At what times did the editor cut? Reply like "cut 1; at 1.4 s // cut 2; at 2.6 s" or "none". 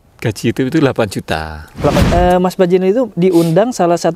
cut 1; at 2.0 s